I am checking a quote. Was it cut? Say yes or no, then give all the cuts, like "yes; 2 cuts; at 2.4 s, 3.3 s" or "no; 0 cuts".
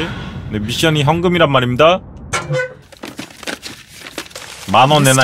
no; 0 cuts